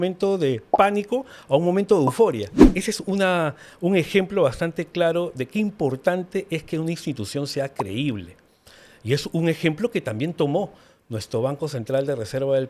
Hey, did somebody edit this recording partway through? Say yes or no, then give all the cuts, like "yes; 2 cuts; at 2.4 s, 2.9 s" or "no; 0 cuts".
yes; 1 cut; at 2.6 s